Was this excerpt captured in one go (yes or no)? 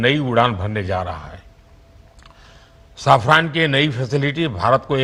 yes